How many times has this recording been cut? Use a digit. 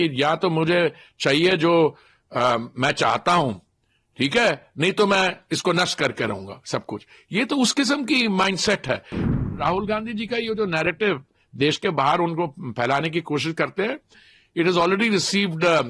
1